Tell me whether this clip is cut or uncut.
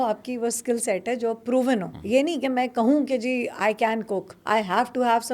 cut